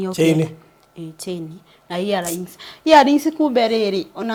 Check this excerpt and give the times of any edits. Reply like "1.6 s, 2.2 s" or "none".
none